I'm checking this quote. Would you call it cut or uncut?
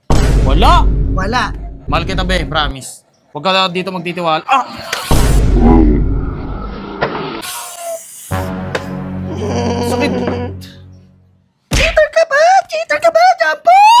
cut